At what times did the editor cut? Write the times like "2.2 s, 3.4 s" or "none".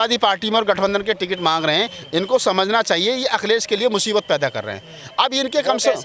none